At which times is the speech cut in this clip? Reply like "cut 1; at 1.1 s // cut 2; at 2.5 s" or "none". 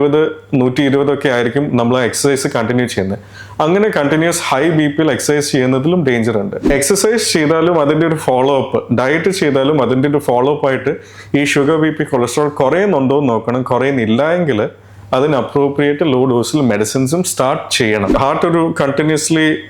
cut 1; at 6.6 s // cut 2; at 18.1 s